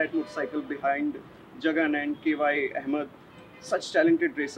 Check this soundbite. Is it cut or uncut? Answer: uncut